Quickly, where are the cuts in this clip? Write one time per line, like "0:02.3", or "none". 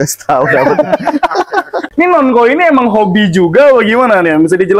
0:01.8